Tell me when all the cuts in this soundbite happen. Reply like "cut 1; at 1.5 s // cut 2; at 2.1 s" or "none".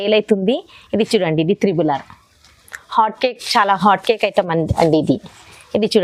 none